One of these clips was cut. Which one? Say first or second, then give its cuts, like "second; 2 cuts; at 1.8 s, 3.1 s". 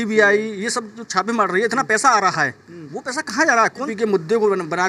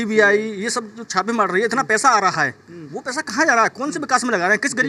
first; 1 cut; at 3.9 s